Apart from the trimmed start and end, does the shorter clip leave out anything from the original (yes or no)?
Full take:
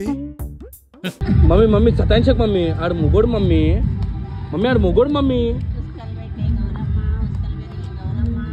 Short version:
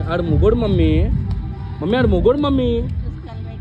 no